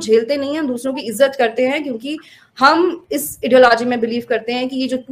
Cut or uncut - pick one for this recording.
uncut